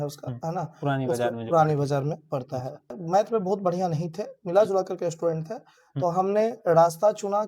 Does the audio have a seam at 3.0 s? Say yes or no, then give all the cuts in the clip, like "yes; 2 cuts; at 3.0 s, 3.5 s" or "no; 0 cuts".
yes; 1 cut; at 3.0 s